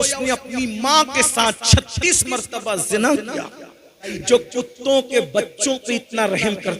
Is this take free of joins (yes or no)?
no